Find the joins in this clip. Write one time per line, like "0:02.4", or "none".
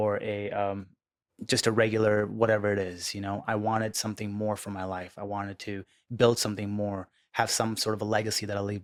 none